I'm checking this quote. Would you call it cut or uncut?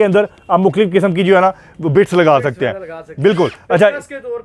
uncut